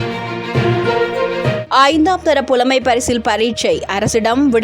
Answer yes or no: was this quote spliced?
yes